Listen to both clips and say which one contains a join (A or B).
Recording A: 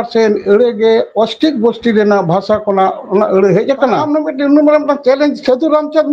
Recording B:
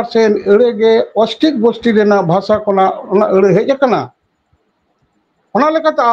A